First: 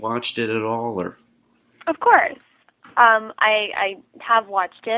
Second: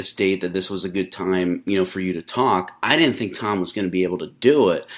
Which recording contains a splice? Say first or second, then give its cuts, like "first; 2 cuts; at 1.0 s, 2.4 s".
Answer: second; 1 cut; at 3.6 s